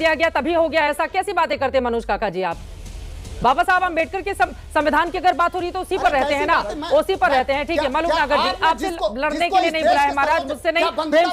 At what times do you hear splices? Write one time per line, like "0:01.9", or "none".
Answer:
none